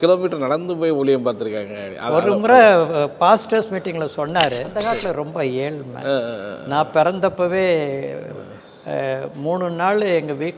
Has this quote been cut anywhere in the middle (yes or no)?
yes